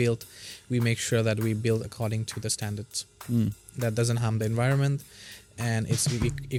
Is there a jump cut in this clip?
no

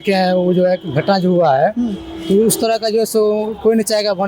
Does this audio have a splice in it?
no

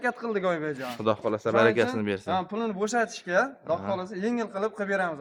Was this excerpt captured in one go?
yes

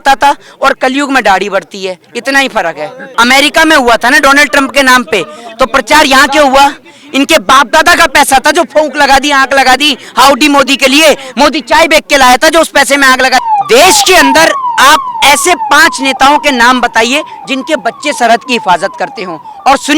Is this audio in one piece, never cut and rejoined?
no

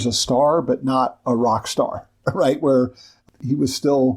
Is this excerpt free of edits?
no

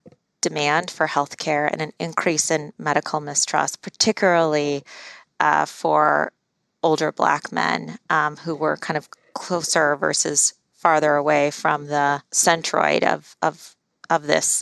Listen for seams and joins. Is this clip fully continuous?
no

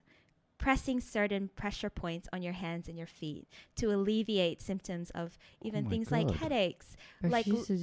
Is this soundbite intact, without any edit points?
yes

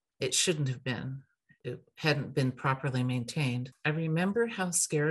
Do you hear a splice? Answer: yes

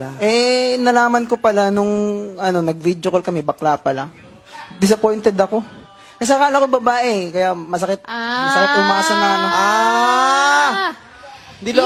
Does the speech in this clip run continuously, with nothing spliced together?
yes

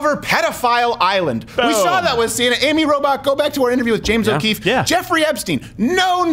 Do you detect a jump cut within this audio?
no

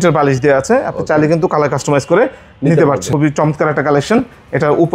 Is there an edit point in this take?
yes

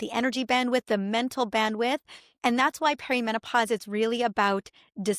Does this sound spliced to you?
no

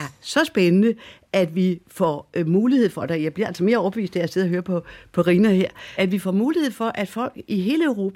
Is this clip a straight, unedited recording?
no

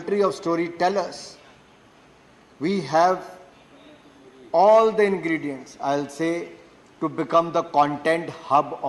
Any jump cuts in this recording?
no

